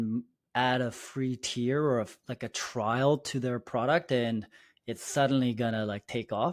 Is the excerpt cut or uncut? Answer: uncut